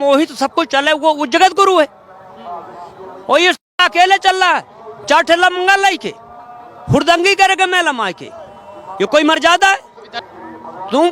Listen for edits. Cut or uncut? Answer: cut